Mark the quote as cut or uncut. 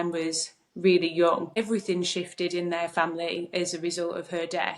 cut